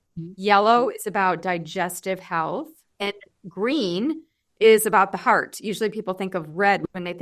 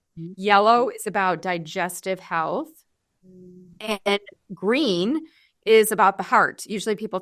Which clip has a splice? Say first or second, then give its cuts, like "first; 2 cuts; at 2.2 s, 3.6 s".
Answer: first; 1 cut; at 3.0 s